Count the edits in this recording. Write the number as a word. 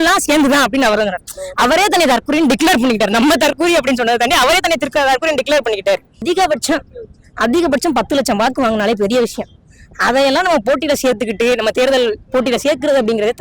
one